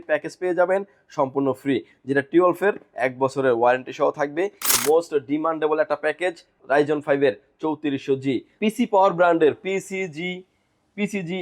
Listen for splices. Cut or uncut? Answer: cut